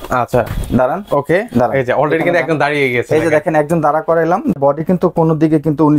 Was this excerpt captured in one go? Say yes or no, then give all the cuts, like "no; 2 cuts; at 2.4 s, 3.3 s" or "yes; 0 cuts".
no; 1 cut; at 4.6 s